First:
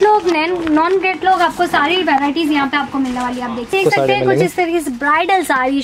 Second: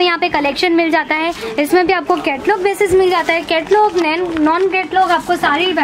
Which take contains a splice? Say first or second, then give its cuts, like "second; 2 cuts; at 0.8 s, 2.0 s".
first; 1 cut; at 3.7 s